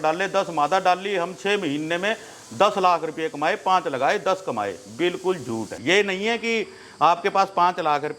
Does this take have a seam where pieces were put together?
yes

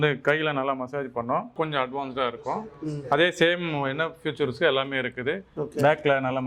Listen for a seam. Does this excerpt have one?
yes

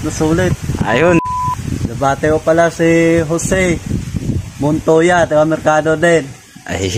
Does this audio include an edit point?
yes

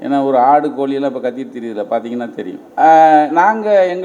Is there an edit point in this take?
yes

